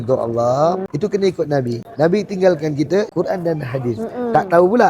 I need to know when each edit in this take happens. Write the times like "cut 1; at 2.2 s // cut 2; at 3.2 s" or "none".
cut 1; at 0.9 s // cut 2; at 1.8 s // cut 3; at 3.1 s